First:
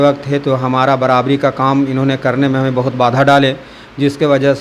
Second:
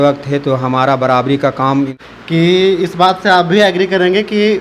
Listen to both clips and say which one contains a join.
second; 1 cut; at 1.9 s

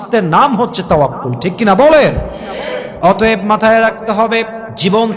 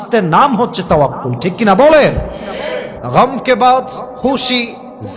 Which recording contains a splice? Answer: second; 2 cuts; at 2.9 s, 4.0 s

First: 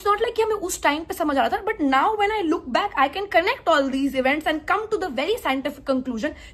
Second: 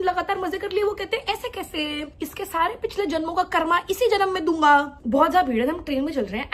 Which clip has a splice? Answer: second; 2 cuts; at 2.1 s, 5.0 s

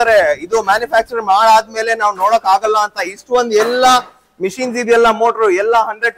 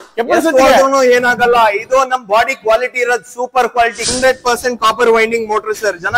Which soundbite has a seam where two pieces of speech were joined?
second; 1 cut; at 4.1 s

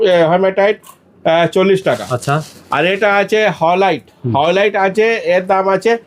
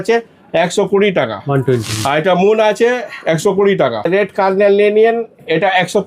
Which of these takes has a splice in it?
second; 1 cut; at 4.1 s

